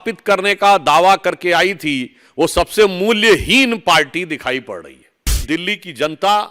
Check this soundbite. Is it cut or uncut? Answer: cut